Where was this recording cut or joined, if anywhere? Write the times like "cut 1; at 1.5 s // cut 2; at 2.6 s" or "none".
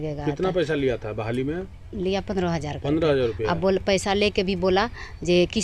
cut 1; at 3.5 s